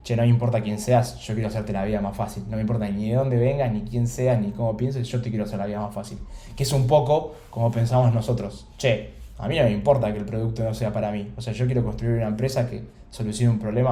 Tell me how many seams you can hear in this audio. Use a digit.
0